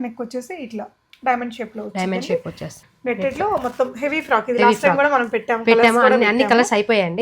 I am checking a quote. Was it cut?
yes; 1 cut; at 2.7 s

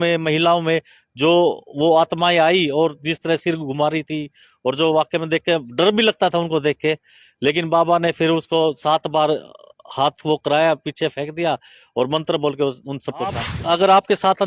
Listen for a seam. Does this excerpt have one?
yes; 1 cut; at 13.5 s

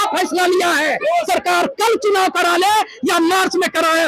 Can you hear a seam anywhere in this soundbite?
yes; 1 cut; at 1.2 s

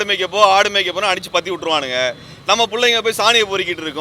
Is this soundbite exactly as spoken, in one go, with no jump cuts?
yes; 0 cuts

